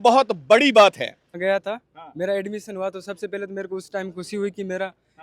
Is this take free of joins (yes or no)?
no